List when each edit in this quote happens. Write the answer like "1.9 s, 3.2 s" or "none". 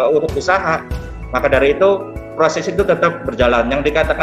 none

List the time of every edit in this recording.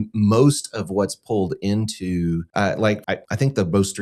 2.5 s, 3.1 s

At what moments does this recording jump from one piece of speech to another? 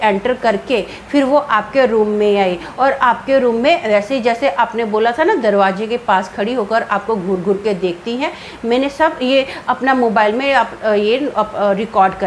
none

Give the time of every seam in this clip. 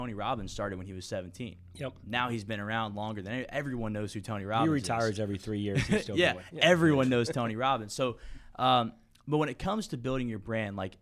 none

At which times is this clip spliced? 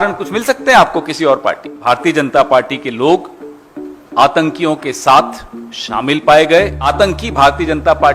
1.8 s, 6.8 s

